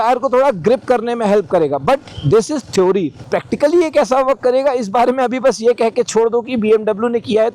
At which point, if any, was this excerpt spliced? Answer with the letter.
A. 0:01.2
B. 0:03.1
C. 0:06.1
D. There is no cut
B